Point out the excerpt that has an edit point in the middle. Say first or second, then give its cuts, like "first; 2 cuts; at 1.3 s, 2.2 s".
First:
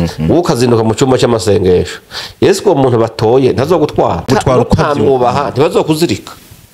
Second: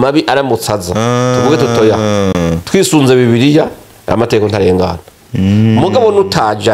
first; 1 cut; at 4.3 s